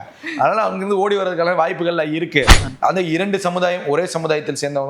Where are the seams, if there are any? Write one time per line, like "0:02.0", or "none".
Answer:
0:02.6